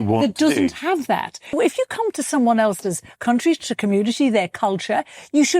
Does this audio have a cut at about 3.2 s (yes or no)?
no